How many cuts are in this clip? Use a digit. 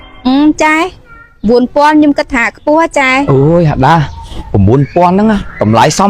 1